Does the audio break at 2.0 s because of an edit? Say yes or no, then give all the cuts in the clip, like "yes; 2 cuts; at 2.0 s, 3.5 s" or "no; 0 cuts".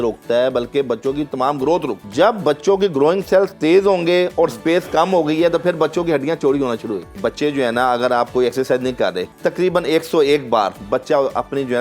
yes; 3 cuts; at 2.0 s, 7.2 s, 9.3 s